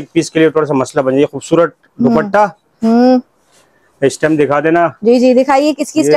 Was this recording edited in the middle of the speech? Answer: no; 0 cuts

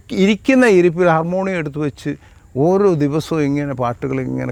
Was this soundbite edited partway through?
no; 0 cuts

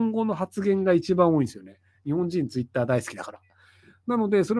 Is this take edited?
no; 0 cuts

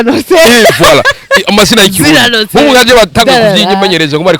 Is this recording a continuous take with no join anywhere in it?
yes; 0 cuts

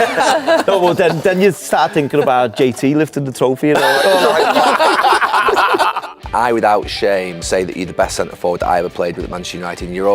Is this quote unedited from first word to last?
no; 2 cuts; at 6.1 s, 7.4 s

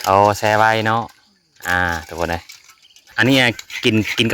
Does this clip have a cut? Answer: yes; 1 cut; at 3.1 s

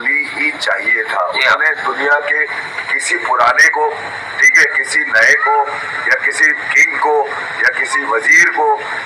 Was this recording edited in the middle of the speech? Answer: no; 0 cuts

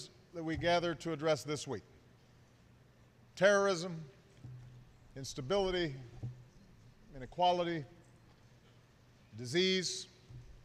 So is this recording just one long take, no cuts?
yes; 0 cuts

